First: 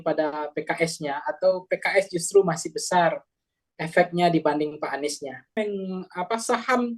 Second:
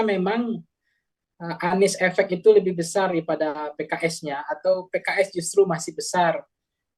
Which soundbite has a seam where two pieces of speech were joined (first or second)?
first